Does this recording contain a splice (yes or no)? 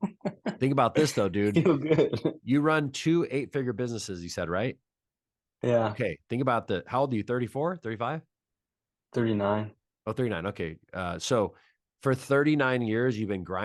no